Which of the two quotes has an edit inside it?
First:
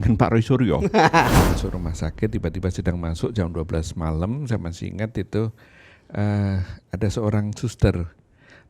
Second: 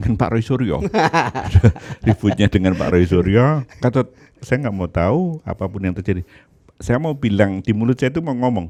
first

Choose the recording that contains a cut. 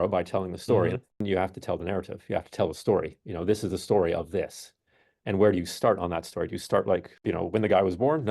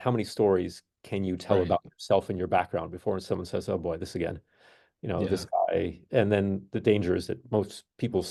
first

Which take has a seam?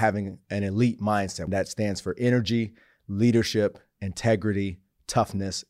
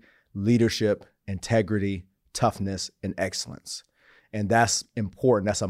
first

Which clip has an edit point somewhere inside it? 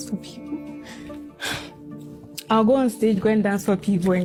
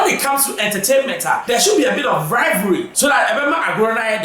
second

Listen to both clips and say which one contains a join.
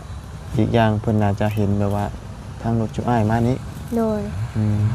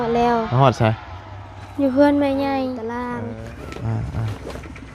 second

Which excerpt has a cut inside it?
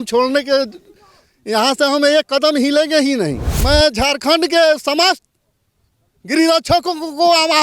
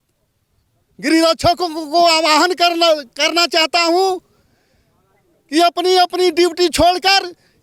first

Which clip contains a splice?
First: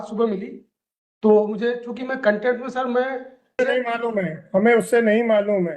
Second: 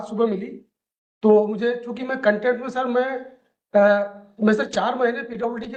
first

